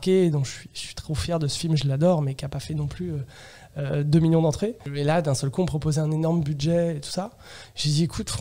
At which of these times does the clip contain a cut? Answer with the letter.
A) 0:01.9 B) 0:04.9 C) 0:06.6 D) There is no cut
B